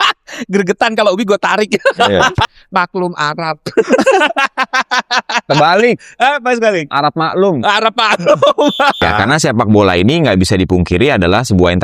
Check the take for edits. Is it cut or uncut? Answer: cut